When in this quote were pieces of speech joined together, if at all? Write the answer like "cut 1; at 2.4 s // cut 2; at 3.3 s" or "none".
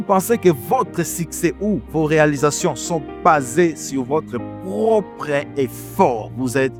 none